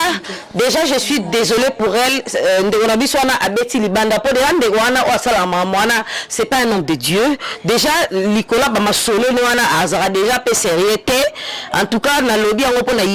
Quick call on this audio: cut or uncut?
uncut